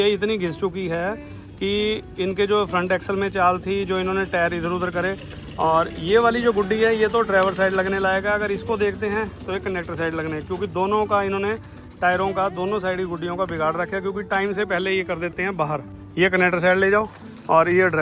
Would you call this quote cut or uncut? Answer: cut